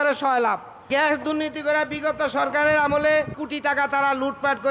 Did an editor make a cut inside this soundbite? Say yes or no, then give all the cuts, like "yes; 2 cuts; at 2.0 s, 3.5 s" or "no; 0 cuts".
yes; 1 cut; at 3.4 s